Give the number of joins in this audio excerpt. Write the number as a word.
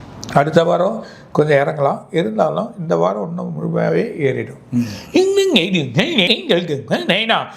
one